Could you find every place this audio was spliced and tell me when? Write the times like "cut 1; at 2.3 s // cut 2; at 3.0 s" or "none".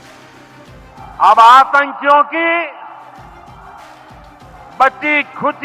cut 1; at 0.9 s